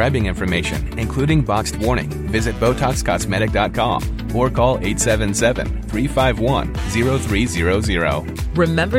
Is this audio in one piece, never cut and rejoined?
yes; 0 cuts

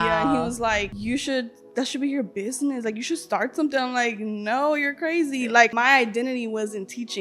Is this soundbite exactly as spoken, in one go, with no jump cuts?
no; 2 cuts; at 0.9 s, 5.7 s

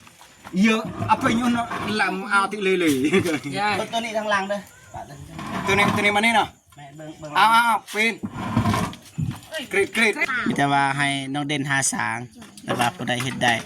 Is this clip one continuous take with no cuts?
no; 1 cut; at 10.2 s

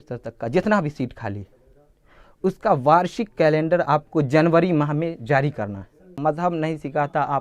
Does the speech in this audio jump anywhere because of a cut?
yes; 1 cut; at 6.2 s

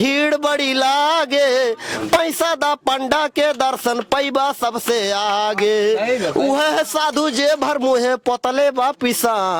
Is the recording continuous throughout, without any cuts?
yes; 0 cuts

